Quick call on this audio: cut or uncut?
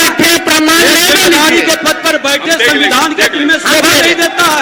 uncut